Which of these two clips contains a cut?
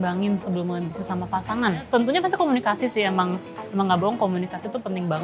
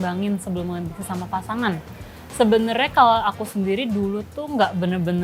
first; 1 cut; at 1.8 s

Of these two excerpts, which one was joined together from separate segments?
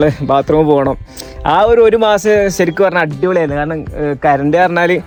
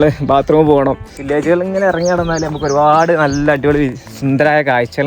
second; 1 cut; at 1.1 s

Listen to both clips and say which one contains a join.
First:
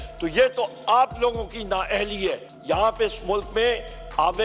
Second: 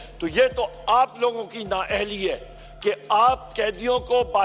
first; 1 cut; at 2.5 s

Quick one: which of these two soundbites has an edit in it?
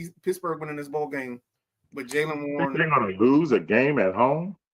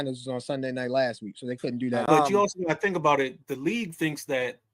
second; 1 cut; at 2.0 s

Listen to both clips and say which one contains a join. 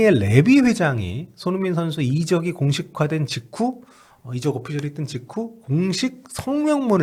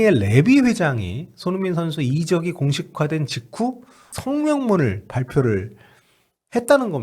second; 1 cut; at 4.1 s

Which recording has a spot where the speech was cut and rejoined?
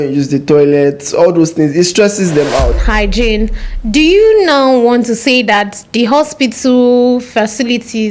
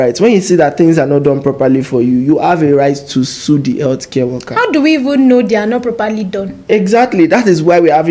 first; 1 cut; at 2.7 s

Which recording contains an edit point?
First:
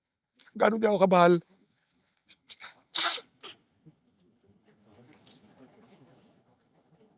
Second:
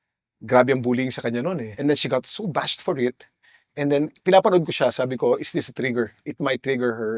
second; 1 cut; at 1.7 s

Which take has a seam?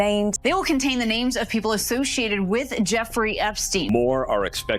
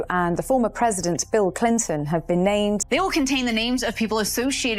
first; 1 cut; at 3.8 s

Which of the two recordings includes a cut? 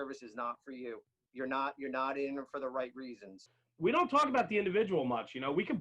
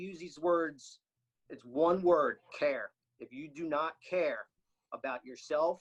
first; 1 cut; at 3.5 s

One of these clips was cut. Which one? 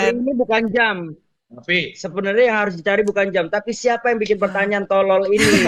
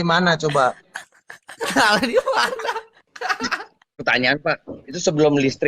second; 1 cut; at 4.0 s

